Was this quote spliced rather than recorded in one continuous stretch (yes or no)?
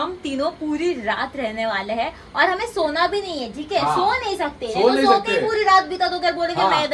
no